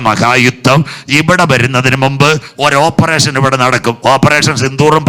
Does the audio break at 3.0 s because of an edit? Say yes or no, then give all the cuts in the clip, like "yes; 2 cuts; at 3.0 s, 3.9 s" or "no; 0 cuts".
no; 0 cuts